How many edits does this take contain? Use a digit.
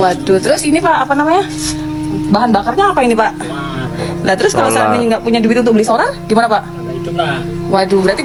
0